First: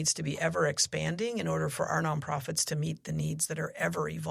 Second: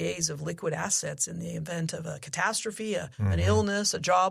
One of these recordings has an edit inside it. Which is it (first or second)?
second